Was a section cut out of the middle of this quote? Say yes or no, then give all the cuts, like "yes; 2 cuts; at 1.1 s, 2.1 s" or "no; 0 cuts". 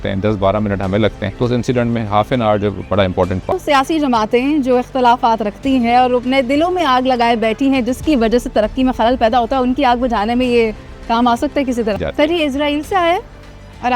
yes; 3 cuts; at 1.3 s, 3.6 s, 12.0 s